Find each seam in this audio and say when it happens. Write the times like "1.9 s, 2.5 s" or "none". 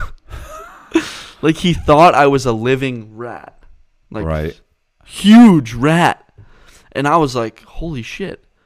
none